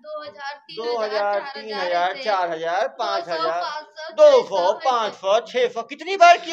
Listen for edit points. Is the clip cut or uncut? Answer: uncut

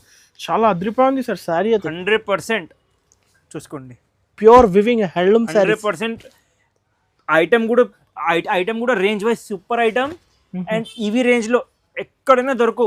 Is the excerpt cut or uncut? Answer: uncut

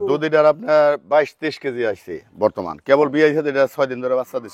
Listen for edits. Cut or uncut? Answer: uncut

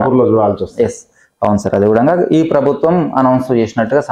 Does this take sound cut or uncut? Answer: uncut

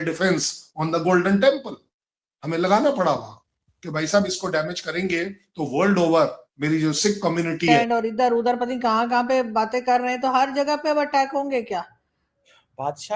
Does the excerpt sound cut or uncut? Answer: cut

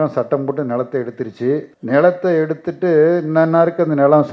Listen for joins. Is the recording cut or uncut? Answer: cut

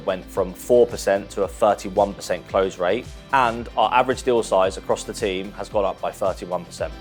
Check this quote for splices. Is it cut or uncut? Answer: uncut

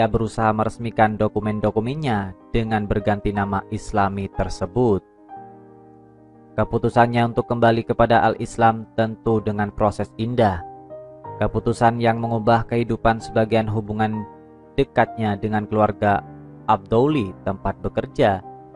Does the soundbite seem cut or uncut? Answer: cut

